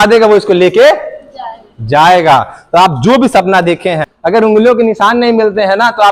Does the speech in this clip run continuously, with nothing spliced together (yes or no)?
no